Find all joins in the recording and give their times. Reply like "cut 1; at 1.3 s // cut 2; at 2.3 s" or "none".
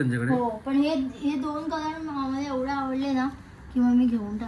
none

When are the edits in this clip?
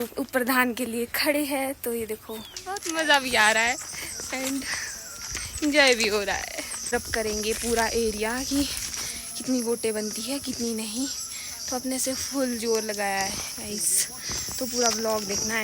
cut 1; at 2.7 s // cut 2; at 6.9 s

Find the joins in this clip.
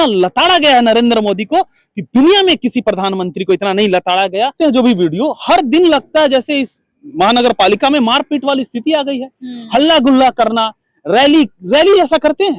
cut 1; at 4.5 s

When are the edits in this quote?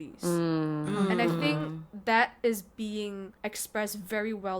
cut 1; at 3.3 s

